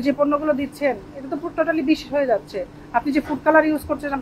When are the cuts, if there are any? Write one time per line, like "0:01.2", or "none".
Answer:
none